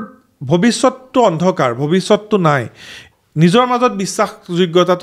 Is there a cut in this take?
no; 0 cuts

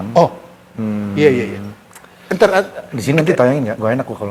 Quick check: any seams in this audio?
no; 0 cuts

